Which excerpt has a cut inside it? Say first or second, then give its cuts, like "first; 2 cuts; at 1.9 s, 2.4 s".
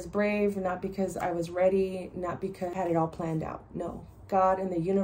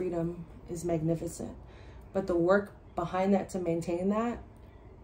first; 1 cut; at 2.7 s